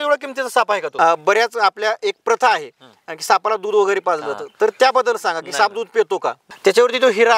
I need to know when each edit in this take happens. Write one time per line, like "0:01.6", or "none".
0:00.9
0:06.5